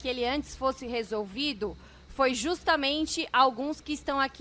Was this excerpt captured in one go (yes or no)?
yes